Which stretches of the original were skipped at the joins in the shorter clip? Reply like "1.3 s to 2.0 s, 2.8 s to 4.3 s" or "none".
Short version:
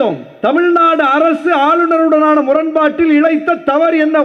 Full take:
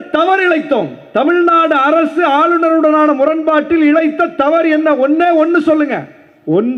none